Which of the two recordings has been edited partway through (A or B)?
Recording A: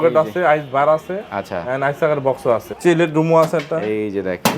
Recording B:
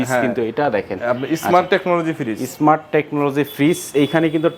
A